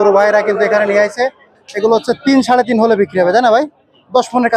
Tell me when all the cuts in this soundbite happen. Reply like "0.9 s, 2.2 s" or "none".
none